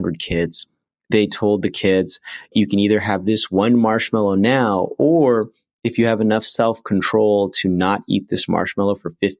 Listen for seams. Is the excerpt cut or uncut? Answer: cut